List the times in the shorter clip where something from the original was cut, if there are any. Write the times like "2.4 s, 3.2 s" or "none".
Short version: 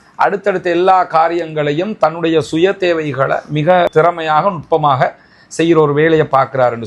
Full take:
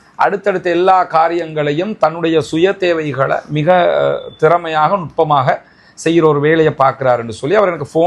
3.9 s